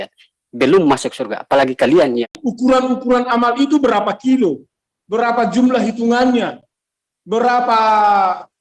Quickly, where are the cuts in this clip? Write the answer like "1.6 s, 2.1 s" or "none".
2.4 s

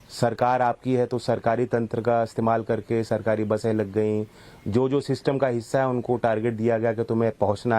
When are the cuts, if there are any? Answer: 3.1 s

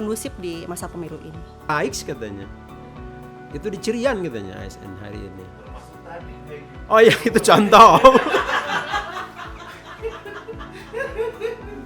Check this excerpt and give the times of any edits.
1.7 s

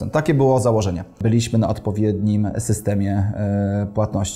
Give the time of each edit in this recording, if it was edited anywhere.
1.2 s

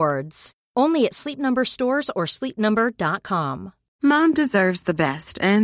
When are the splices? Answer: 3.8 s

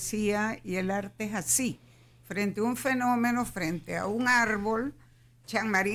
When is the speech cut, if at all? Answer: none

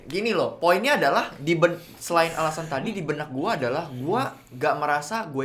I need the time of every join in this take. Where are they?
none

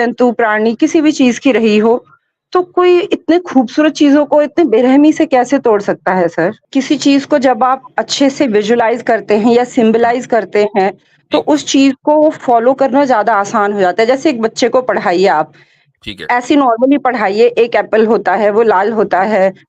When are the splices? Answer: 6.6 s

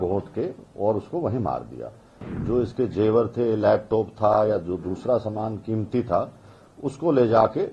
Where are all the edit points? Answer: 2.3 s

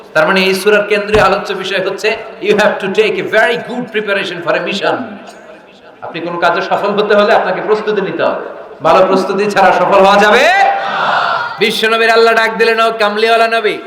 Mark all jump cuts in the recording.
11.5 s

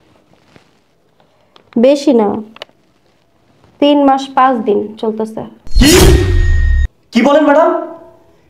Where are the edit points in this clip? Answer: none

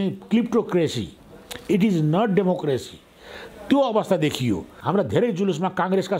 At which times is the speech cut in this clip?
4.7 s

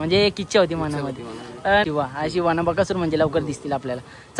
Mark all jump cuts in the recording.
1.8 s

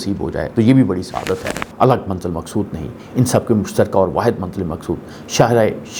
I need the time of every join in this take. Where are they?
1.6 s

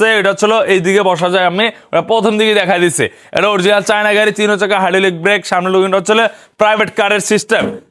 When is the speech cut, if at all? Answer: none

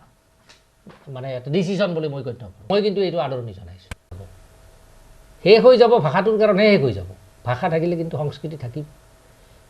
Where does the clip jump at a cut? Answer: 2.6 s, 4.1 s

